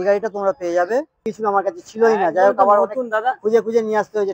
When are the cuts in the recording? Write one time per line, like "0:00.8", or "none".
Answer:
0:01.3